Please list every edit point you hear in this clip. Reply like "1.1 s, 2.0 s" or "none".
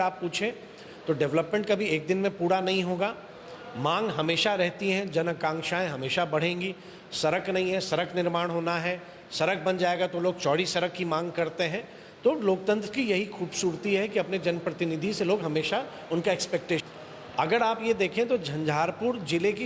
16.8 s